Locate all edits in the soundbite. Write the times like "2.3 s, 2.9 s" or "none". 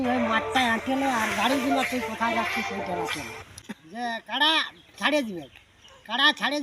3.6 s